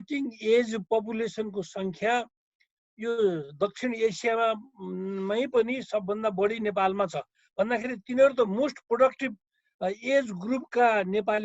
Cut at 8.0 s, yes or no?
no